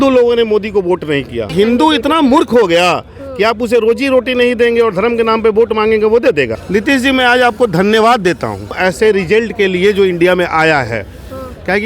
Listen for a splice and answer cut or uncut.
cut